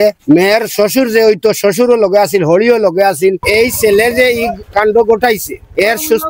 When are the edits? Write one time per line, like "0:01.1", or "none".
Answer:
0:03.4